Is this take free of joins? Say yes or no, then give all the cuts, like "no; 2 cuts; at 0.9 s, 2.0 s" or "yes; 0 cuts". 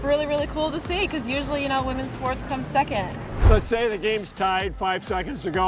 no; 1 cut; at 3.4 s